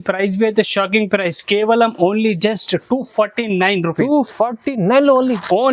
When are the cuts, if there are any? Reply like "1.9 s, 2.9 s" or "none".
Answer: none